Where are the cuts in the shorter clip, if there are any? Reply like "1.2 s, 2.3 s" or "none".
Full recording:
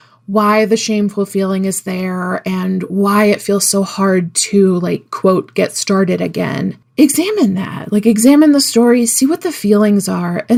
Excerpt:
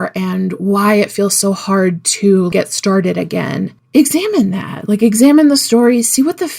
2.5 s